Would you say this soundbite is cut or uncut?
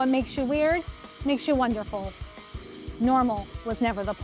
uncut